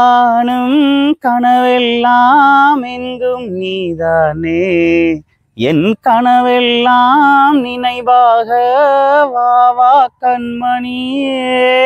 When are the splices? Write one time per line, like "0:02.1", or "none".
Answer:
none

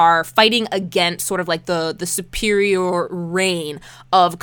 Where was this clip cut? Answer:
none

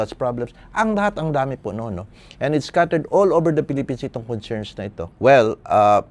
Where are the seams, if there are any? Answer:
0:05.1

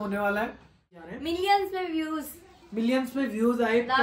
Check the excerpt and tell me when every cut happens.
0:01.0

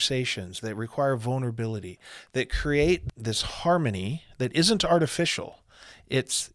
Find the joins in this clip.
0:03.0

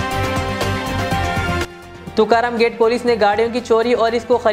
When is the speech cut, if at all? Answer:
0:01.6

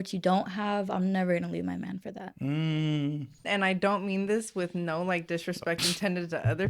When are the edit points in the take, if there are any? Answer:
0:03.4

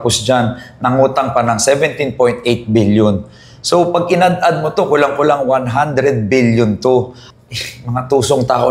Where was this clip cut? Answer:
0:07.2

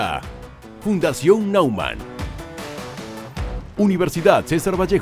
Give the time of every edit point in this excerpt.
0:03.7

